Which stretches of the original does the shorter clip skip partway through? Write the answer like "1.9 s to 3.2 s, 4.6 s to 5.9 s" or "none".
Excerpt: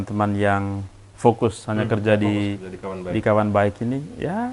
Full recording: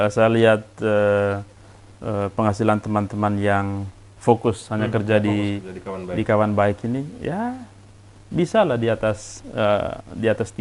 none